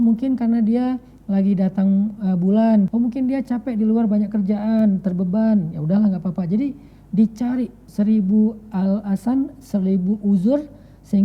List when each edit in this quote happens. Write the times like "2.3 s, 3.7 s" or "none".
2.9 s, 7.8 s